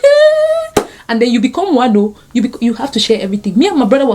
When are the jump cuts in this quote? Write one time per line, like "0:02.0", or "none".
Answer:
none